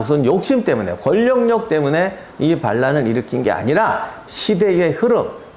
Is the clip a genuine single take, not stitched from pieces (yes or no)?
yes